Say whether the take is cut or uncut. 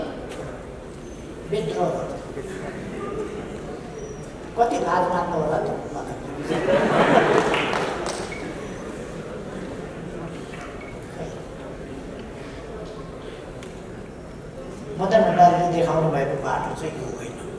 uncut